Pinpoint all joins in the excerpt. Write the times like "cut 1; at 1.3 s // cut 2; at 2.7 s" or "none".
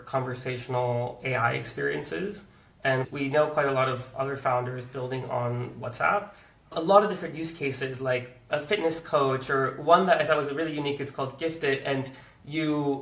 none